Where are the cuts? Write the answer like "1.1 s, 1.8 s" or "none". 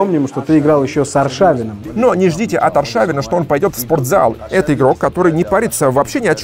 1.8 s, 4.4 s

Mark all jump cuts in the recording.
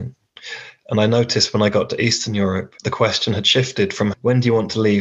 2.8 s

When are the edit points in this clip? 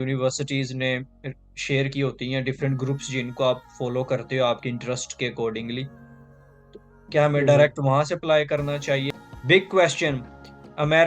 9.1 s

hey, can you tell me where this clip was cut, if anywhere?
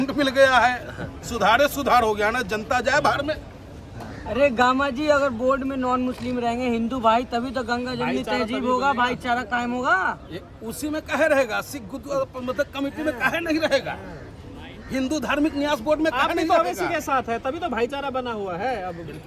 none

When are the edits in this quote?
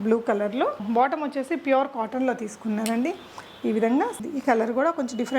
4.1 s

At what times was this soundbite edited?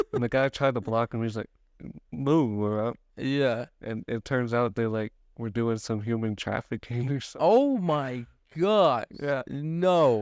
none

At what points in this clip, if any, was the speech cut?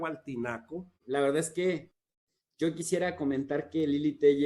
1.0 s

